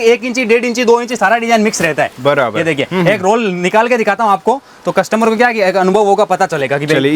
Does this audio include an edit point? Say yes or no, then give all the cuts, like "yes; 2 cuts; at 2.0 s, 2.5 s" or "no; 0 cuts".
no; 0 cuts